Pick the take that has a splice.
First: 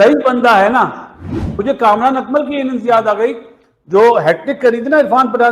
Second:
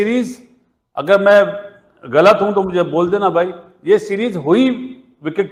first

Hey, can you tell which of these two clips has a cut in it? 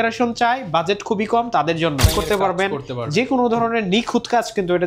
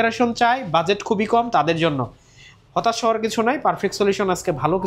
first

